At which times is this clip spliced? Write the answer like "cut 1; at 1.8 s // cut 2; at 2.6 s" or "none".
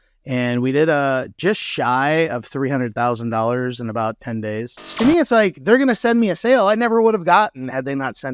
cut 1; at 4.8 s